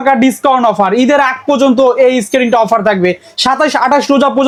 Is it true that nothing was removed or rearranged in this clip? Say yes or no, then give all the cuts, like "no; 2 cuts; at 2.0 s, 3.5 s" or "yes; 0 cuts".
yes; 0 cuts